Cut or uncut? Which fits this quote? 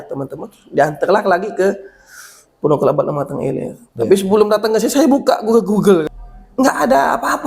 cut